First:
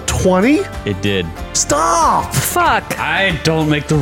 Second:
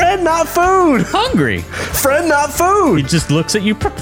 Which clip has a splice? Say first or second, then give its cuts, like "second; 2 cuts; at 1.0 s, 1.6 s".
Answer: first; 1 cut; at 1.1 s